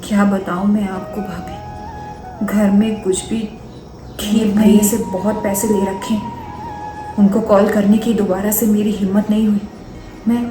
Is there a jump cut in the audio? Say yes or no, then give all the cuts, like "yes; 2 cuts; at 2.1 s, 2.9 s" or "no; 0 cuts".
yes; 1 cut; at 4.9 s